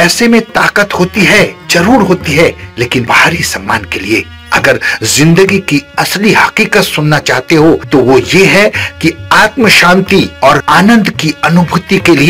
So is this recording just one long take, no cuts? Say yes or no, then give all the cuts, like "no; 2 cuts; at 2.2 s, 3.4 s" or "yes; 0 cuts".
no; 3 cuts; at 3.0 s, 7.8 s, 10.6 s